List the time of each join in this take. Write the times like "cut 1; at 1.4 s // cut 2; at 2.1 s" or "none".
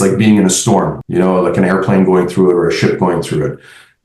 cut 1; at 1.0 s